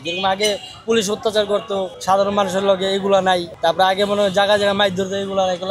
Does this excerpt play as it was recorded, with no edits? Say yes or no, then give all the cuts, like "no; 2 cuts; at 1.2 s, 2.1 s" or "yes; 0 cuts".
no; 2 cuts; at 1.9 s, 3.5 s